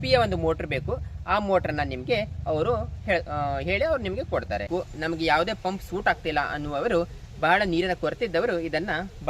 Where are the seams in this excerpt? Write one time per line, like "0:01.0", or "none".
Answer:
0:04.7